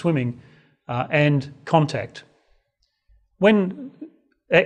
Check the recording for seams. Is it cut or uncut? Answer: cut